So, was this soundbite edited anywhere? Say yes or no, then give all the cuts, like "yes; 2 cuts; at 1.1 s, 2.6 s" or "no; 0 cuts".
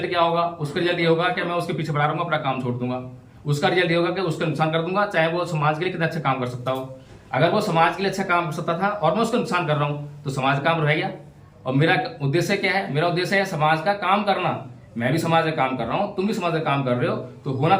no; 0 cuts